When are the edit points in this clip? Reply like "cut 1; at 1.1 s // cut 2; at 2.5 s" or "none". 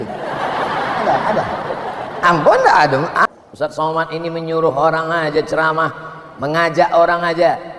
cut 1; at 3.2 s